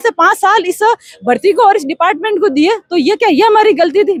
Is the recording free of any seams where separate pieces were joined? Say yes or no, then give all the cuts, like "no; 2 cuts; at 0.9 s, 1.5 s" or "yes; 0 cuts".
yes; 0 cuts